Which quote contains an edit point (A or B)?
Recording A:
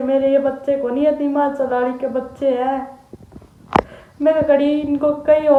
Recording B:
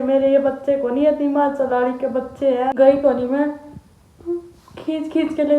B